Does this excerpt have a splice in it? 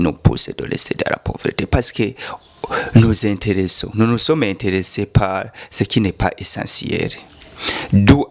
no; 0 cuts

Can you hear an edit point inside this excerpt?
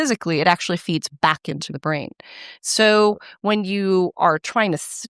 no; 0 cuts

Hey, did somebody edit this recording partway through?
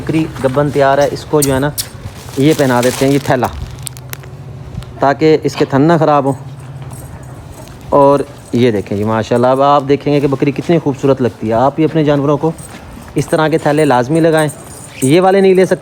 no; 0 cuts

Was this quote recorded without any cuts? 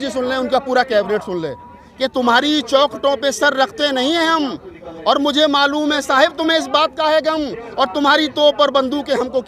yes; 0 cuts

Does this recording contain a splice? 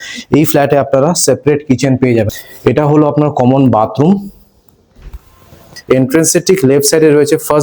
yes; 2 cuts; at 2.3 s, 5.7 s

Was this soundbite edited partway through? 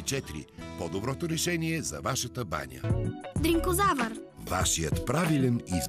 yes; 1 cut; at 2.7 s

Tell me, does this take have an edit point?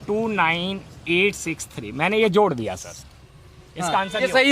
no; 0 cuts

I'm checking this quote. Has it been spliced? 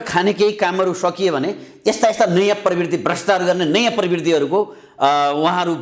no; 0 cuts

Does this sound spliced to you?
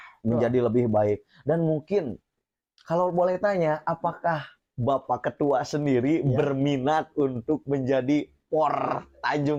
no; 0 cuts

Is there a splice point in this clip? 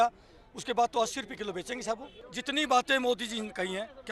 yes; 1 cut; at 2.3 s

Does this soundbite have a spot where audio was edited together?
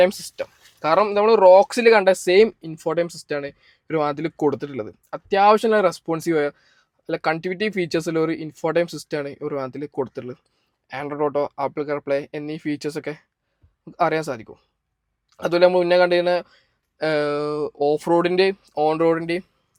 no; 0 cuts

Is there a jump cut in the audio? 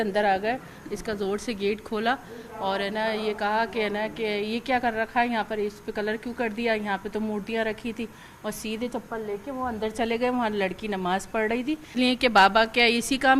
yes; 1 cut; at 11.9 s

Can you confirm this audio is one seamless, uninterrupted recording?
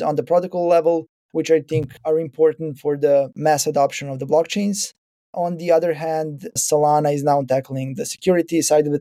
no; 2 cuts; at 3.3 s, 6.6 s

